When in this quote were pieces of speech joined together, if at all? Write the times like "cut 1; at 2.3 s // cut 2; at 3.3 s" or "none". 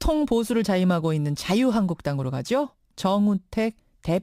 none